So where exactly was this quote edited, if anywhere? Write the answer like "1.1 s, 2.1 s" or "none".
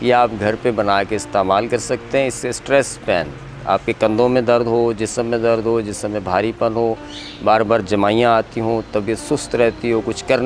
none